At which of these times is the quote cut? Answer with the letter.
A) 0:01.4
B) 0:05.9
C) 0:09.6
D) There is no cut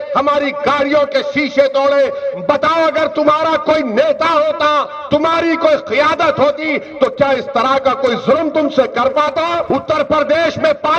C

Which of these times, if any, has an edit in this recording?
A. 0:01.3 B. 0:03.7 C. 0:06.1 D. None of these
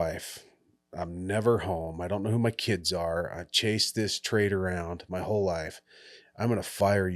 D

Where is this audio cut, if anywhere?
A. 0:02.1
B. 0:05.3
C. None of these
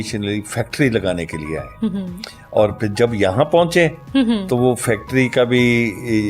C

